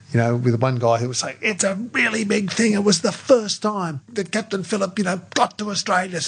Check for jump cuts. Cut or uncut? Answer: cut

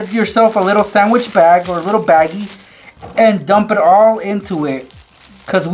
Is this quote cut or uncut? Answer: uncut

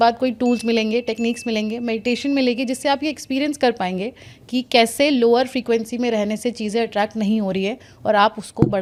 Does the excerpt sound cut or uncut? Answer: uncut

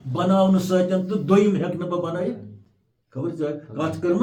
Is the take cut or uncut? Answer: uncut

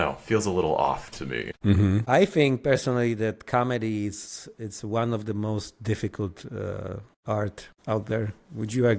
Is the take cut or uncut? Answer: cut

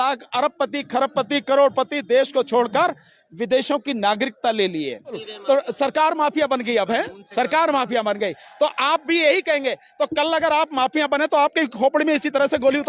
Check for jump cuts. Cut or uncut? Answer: cut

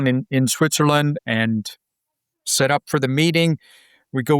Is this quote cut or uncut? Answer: cut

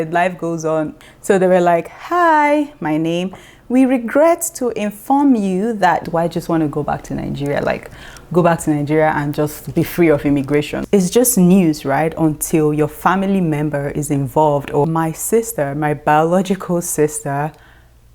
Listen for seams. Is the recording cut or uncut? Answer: cut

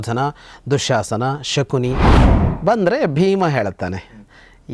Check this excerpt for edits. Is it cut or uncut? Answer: cut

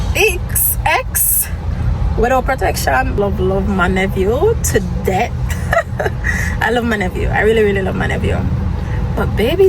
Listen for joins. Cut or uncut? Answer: cut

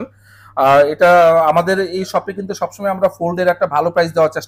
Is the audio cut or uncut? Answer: uncut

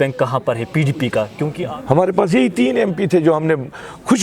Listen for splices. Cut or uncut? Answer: cut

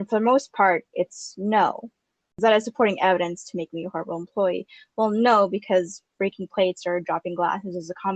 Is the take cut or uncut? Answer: cut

